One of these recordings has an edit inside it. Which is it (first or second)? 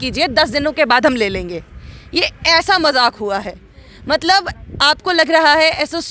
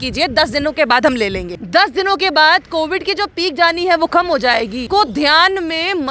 second